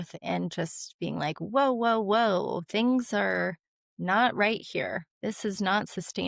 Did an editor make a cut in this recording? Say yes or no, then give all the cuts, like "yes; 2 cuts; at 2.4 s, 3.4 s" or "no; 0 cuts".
yes; 1 cut; at 5.1 s